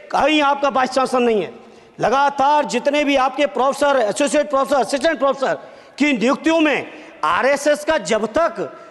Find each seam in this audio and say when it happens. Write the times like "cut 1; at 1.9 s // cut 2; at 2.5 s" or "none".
none